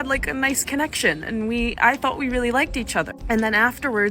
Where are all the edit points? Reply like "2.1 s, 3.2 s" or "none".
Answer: 3.1 s